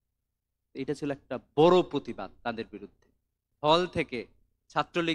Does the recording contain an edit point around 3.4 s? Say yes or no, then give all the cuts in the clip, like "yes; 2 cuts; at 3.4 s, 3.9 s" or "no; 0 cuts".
yes; 1 cut; at 3.4 s